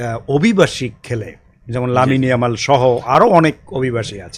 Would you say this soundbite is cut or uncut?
uncut